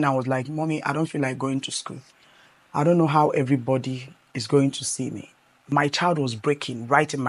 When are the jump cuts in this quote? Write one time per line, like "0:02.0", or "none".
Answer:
none